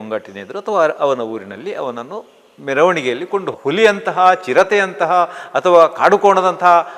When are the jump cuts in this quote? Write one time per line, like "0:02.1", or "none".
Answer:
0:03.6